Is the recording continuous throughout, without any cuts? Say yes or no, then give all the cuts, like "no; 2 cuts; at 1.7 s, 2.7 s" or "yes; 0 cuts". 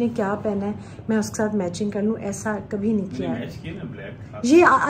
yes; 0 cuts